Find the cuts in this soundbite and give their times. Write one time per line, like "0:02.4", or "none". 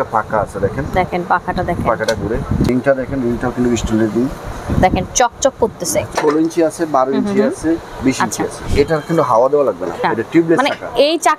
0:02.7
0:04.5
0:06.1
0:08.6
0:10.0

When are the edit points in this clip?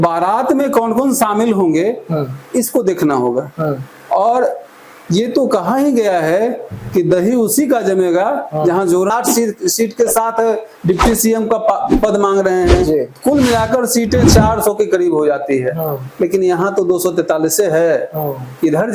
0:09.1

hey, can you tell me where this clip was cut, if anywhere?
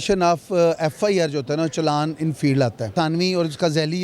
0:02.9

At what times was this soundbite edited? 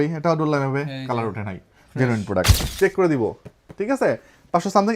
0:02.5

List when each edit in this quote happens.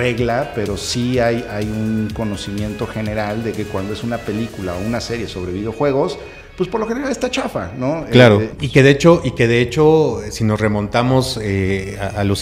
0:08.6

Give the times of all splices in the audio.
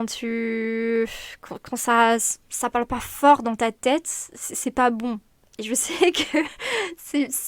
none

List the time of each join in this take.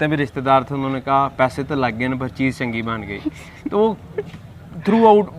none

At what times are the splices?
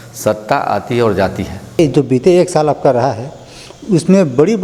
0:01.8

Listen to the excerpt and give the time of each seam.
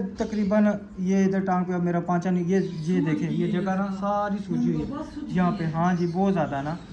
none

